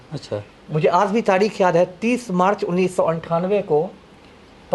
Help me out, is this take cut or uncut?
uncut